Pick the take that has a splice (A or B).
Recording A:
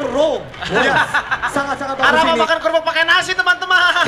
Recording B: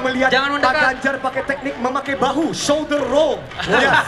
A